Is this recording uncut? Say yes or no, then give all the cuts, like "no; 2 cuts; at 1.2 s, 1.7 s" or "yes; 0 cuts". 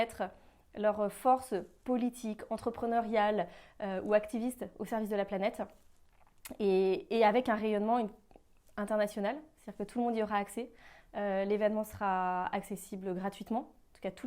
yes; 0 cuts